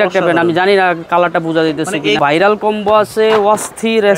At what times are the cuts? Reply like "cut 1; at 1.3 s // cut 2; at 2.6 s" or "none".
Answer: cut 1; at 2.2 s

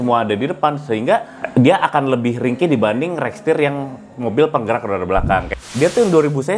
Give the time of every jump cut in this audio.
cut 1; at 1.4 s // cut 2; at 5.6 s

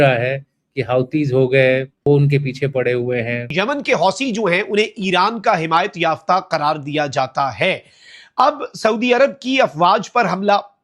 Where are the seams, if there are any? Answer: cut 1; at 2.0 s // cut 2; at 3.5 s

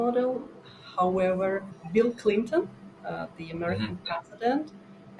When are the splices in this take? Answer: cut 1; at 1.7 s

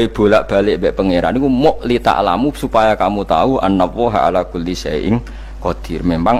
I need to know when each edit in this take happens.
none

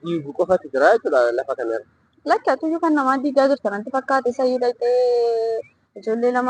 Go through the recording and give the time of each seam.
none

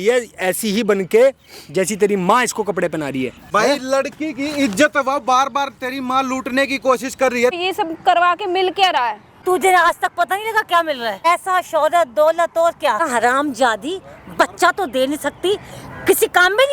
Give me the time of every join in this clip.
cut 1; at 3.4 s // cut 2; at 7.6 s // cut 3; at 9.3 s // cut 4; at 11.2 s // cut 5; at 13.1 s

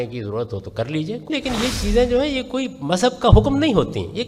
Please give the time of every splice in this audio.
cut 1; at 1.3 s

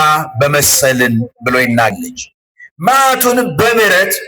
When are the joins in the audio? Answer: cut 1; at 2.0 s

